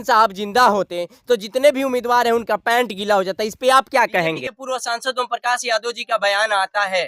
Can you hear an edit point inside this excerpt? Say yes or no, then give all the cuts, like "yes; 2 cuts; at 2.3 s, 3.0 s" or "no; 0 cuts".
yes; 1 cut; at 4.6 s